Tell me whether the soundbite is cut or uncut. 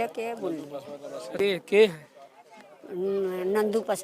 cut